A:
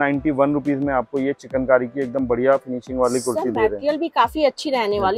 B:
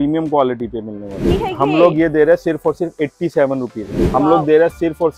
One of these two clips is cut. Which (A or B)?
B